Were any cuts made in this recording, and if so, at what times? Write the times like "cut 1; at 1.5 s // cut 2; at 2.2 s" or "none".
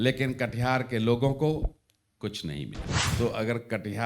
cut 1; at 2.9 s